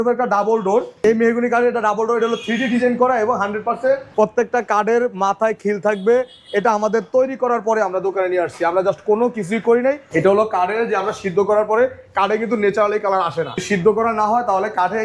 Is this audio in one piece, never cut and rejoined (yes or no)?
no